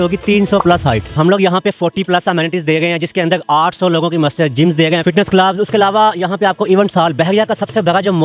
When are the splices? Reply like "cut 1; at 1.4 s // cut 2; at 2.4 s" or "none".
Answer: cut 1; at 1.2 s // cut 2; at 5.0 s